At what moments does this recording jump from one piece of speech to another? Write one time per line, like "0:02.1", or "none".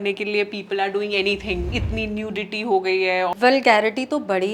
0:01.6
0:03.3